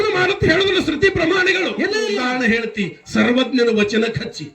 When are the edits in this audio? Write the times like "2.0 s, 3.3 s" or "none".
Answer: 2.1 s